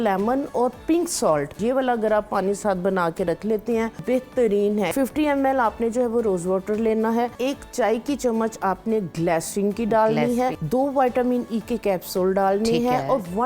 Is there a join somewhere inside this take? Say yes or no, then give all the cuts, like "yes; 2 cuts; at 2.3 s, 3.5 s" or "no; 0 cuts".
yes; 5 cuts; at 1.6 s, 4.0 s, 4.9 s, 7.3 s, 10.6 s